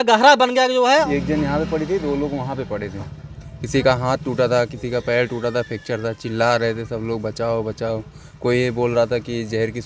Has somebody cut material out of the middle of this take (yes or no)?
yes